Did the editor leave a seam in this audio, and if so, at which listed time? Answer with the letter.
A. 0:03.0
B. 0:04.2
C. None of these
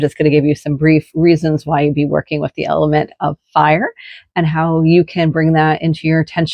C